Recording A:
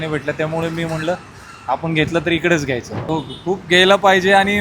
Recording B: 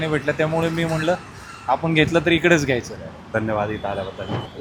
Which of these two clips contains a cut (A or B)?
A